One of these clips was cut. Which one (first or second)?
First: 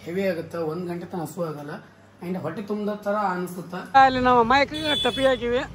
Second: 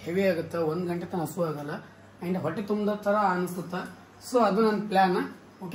first